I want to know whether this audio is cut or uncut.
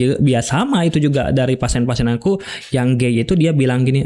uncut